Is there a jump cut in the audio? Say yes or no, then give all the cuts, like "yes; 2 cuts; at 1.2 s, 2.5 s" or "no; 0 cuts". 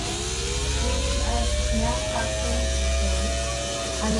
no; 0 cuts